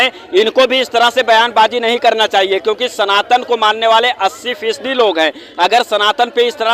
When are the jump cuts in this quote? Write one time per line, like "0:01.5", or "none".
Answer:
none